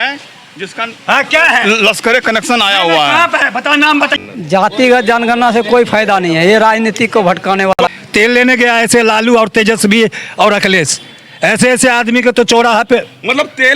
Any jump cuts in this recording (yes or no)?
yes